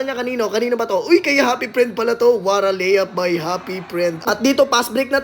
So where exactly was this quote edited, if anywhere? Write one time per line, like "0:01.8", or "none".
0:04.2